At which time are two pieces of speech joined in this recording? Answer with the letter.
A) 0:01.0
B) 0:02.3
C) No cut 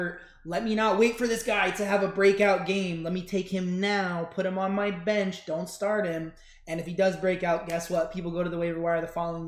C